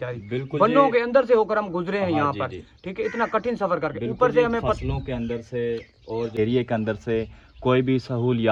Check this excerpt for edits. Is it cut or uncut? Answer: uncut